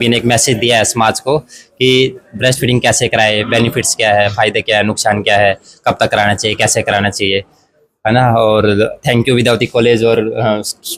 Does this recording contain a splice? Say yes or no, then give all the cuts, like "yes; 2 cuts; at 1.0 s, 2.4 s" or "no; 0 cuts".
no; 0 cuts